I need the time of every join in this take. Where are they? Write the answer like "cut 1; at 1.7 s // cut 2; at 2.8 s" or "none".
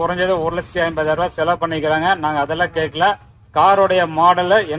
none